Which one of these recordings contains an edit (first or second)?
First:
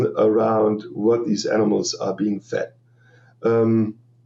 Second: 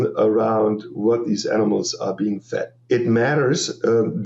second